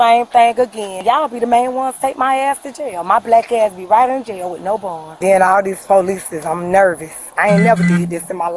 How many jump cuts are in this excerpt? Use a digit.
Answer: 2